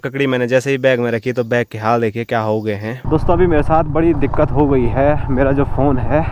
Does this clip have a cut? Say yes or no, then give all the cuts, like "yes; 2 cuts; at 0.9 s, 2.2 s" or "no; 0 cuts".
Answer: yes; 1 cut; at 3.0 s